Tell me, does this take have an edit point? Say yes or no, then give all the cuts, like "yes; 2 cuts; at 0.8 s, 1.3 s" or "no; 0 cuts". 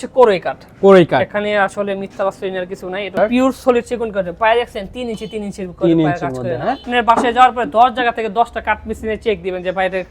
yes; 2 cuts; at 3.1 s, 6.9 s